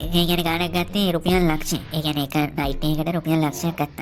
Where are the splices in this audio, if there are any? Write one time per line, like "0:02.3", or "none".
none